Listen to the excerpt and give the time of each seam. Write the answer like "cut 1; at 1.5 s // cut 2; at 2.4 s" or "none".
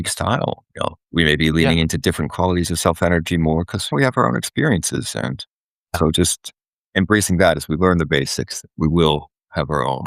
cut 1; at 1.0 s // cut 2; at 3.9 s // cut 3; at 6.0 s